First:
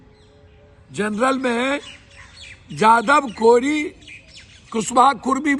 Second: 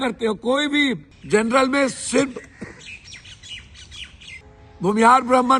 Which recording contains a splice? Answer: second; 2 cuts; at 1.1 s, 4.4 s

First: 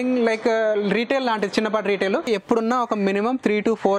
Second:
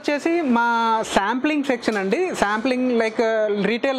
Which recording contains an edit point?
first; 1 cut; at 2.3 s

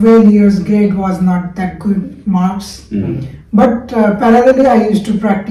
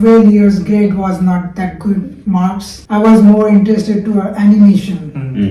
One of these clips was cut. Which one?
second; 1 cut; at 2.8 s

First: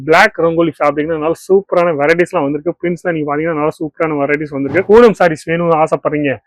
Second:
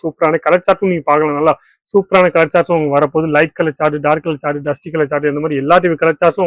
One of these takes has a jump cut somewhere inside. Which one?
first; 1 cut; at 4.8 s

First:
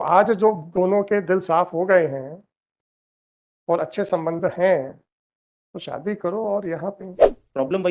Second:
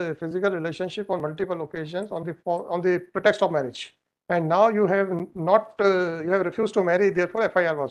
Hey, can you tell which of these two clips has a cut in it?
first; 1 cut; at 7.0 s

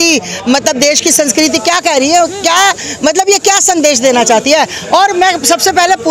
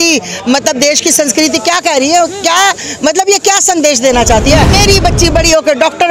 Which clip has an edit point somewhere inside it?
second; 1 cut; at 4.8 s

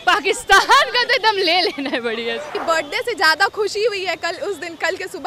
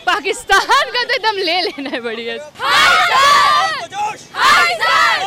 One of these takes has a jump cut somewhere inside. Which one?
first; 1 cut; at 2.5 s

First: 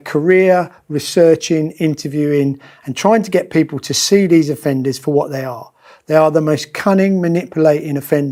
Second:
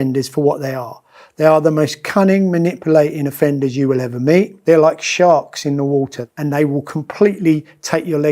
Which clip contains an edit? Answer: second; 2 cuts; at 4.5 s, 6.2 s

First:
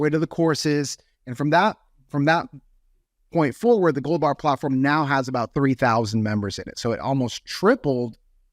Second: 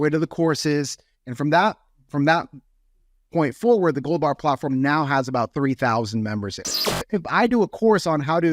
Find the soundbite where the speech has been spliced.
second; 1 cut; at 6.6 s

